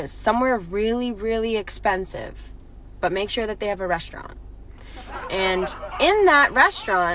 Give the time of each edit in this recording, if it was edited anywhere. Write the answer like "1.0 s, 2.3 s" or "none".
4.4 s